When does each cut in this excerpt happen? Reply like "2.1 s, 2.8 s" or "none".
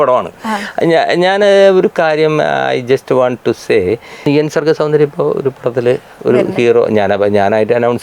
4.2 s